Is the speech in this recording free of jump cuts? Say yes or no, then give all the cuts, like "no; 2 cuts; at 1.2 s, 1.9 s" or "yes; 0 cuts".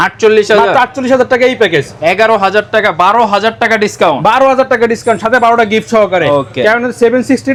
yes; 0 cuts